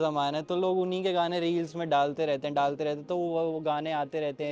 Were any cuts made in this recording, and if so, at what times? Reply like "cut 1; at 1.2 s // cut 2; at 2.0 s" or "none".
none